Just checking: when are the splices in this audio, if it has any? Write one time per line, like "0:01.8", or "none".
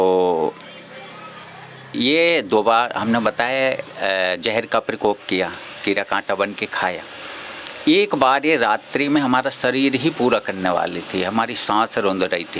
none